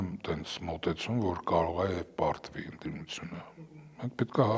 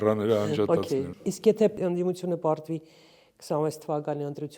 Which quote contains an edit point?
second; 1 cut; at 1.1 s

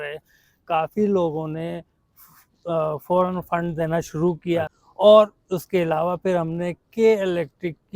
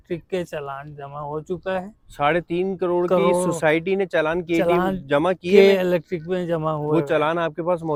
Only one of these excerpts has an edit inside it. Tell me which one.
first; 1 cut; at 4.8 s

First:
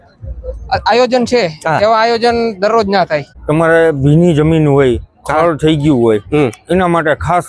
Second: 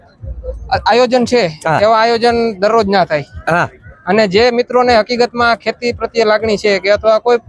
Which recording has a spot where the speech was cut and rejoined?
first; 1 cut; at 3.3 s

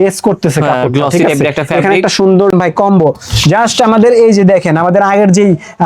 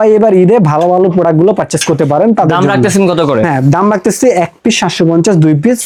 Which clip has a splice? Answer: first; 1 cut; at 2.5 s

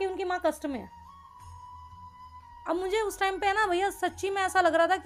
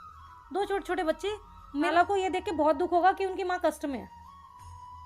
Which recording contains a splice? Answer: second; 1 cut; at 1.9 s

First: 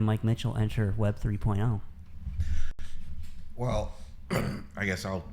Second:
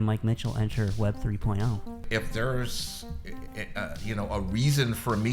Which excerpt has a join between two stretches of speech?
second; 1 cut; at 2.0 s

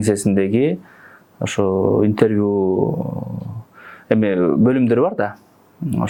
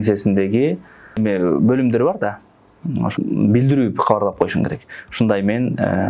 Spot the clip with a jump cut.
second; 2 cuts; at 1.2 s, 3.1 s

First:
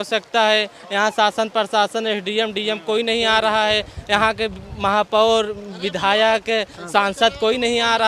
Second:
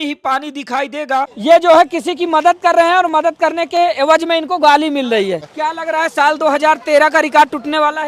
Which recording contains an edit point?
second; 2 cuts; at 1.3 s, 5.5 s

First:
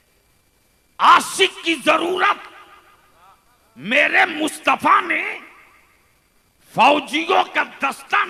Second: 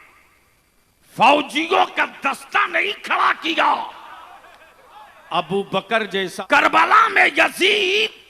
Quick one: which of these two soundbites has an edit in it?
second; 1 cut; at 6.3 s

